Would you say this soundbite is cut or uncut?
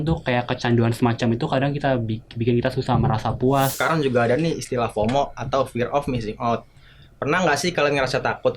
cut